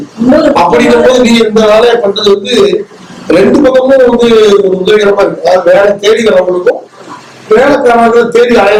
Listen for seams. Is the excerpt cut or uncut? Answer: uncut